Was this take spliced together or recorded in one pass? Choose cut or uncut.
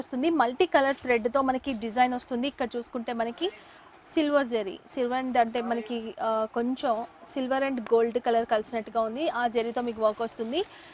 uncut